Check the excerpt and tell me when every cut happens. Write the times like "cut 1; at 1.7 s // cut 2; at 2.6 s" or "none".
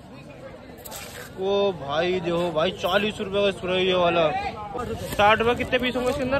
cut 1; at 4.6 s